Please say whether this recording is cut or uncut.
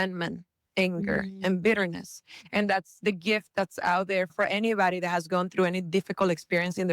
cut